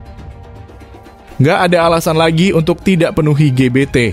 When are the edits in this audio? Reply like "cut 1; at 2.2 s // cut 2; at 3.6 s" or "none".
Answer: cut 1; at 1.4 s